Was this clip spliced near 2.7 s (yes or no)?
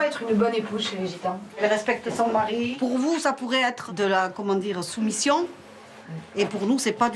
yes